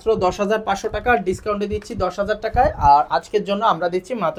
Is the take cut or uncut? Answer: uncut